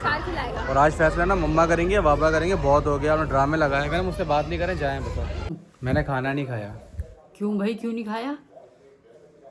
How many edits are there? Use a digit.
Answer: 1